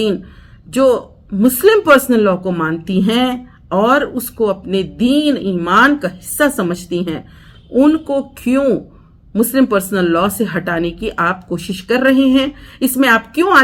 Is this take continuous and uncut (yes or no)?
yes